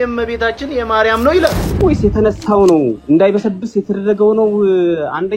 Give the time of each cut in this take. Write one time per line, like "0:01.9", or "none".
0:01.6

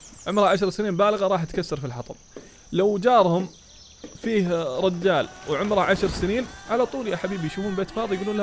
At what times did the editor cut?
0:06.6

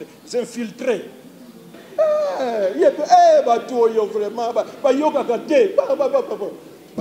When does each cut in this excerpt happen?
0:01.8

